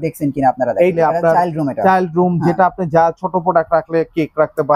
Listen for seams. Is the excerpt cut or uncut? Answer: cut